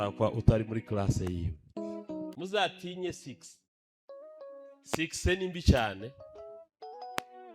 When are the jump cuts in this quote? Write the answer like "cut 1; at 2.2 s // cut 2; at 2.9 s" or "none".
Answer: cut 1; at 2.3 s